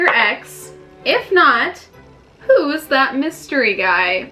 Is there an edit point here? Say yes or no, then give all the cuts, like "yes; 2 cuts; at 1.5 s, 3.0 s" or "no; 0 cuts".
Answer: no; 0 cuts